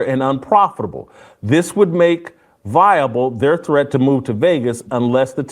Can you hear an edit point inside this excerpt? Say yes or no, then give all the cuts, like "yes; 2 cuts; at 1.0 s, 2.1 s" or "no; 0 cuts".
yes; 1 cut; at 3.9 s